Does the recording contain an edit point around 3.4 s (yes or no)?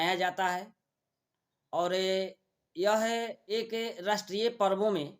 yes